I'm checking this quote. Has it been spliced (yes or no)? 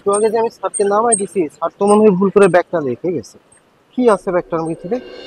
no